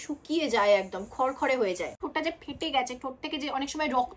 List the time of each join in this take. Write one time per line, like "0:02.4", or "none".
0:02.0